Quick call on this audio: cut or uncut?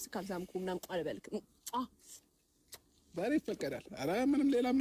uncut